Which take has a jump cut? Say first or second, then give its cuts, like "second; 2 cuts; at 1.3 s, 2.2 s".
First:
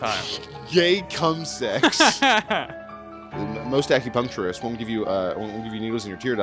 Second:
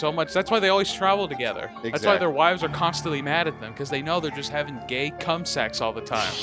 first; 1 cut; at 2.7 s